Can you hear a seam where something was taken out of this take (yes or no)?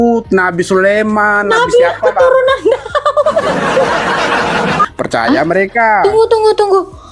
yes